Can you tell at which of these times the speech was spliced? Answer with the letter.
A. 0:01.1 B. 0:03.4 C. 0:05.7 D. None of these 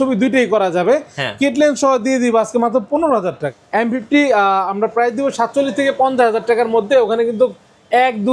B